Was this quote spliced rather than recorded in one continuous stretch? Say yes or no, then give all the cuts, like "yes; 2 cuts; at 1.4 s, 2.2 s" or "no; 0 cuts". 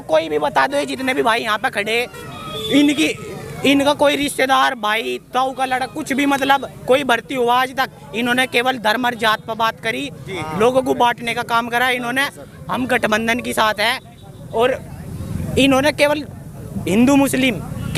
no; 0 cuts